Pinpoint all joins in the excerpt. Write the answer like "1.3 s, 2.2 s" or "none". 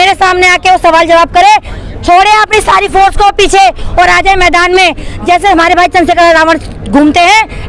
none